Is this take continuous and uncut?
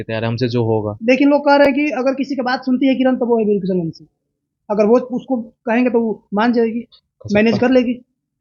yes; 0 cuts

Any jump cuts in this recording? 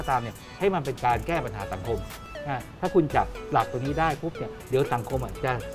yes; 1 cut; at 2.2 s

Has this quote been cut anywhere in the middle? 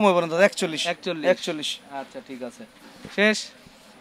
no; 0 cuts

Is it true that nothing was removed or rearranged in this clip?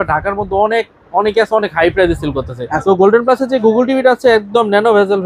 no; 1 cut; at 2.7 s

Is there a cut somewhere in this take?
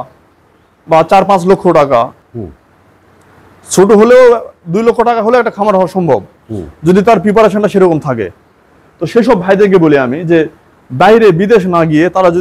yes; 1 cut; at 2.2 s

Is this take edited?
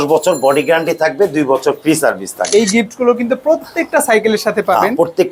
yes; 1 cut; at 2.4 s

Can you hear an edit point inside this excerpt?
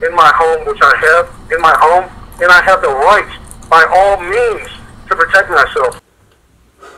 no; 0 cuts

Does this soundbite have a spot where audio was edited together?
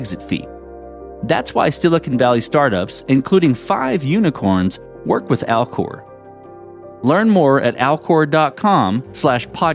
no; 0 cuts

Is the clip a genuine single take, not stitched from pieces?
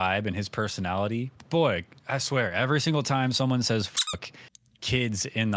no; 1 cut; at 1.4 s

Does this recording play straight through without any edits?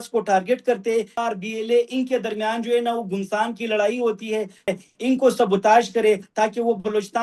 no; 2 cuts; at 1.2 s, 4.7 s

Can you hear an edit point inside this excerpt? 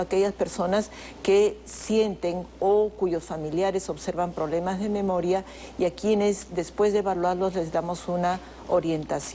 yes; 1 cut; at 2.9 s

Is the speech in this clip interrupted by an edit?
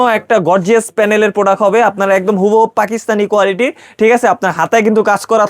no; 0 cuts

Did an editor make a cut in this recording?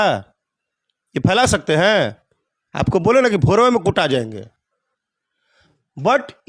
no; 0 cuts

